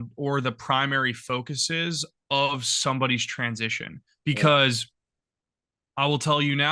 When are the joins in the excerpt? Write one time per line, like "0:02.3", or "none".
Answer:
none